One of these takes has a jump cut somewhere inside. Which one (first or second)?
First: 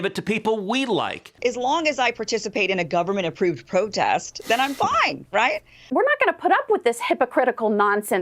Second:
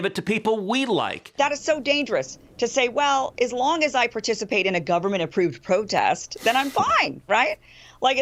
first